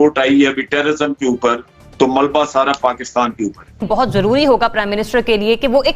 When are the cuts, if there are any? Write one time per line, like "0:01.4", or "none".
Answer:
0:03.8